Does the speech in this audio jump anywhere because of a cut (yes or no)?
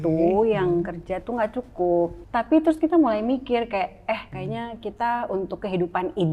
yes